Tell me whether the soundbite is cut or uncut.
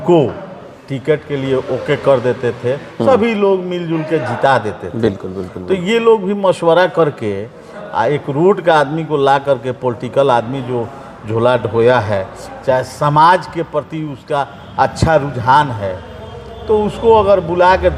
uncut